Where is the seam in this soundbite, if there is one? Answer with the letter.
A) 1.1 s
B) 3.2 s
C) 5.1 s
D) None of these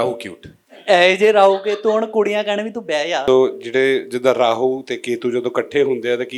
B